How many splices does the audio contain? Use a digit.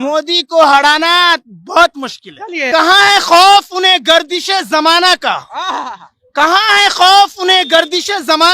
1